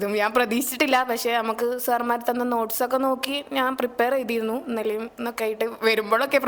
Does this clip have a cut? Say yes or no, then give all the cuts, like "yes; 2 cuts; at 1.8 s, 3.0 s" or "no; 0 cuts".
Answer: no; 0 cuts